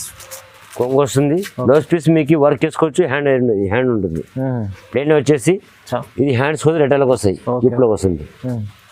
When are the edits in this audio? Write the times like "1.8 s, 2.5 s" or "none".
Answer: none

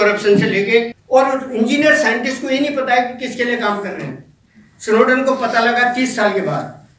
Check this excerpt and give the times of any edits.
1.0 s

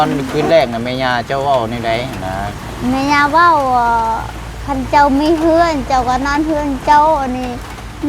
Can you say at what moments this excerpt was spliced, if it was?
none

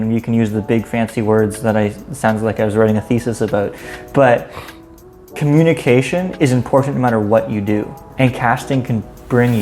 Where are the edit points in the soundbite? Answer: 8.0 s

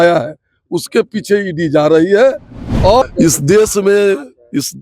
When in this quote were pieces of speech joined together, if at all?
3.0 s

